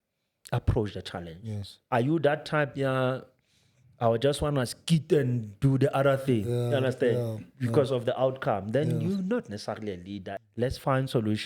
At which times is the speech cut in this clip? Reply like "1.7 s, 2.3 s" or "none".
10.2 s